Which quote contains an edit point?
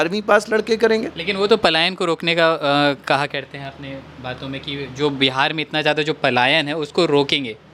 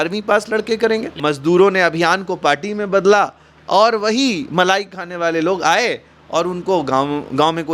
second; 1 cut; at 1.1 s

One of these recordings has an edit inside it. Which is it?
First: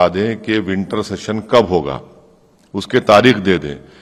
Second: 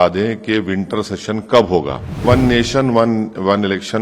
second; 1 cut; at 2.2 s

